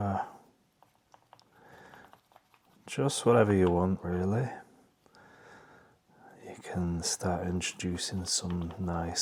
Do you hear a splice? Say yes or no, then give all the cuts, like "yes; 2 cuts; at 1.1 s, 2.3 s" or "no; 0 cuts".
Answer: no; 0 cuts